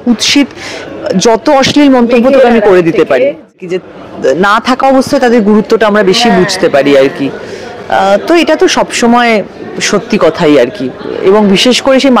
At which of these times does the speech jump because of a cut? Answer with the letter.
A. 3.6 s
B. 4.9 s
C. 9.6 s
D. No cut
A